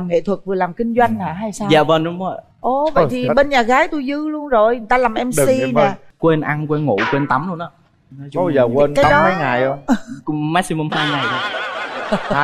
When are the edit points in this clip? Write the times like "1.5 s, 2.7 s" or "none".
6.1 s

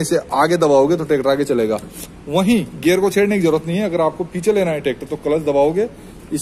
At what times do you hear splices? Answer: none

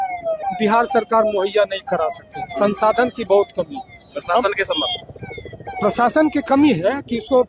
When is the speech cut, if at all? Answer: none

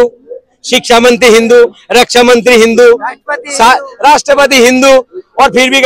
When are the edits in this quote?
none

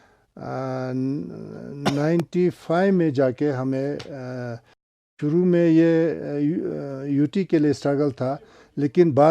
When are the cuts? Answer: 5.2 s

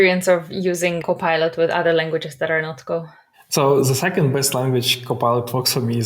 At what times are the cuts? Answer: 1.0 s

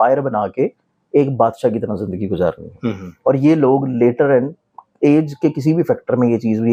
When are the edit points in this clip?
none

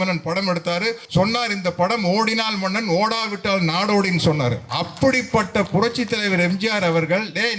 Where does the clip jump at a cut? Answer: 1.0 s, 4.7 s

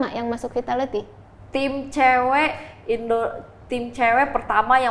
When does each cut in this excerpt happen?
none

